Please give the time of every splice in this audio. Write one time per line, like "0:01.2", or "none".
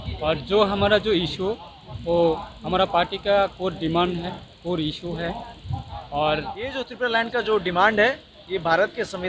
0:06.9